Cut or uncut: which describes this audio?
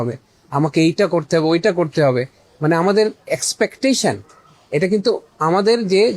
cut